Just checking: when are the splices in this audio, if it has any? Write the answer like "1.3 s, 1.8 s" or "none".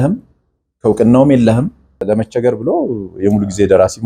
2.0 s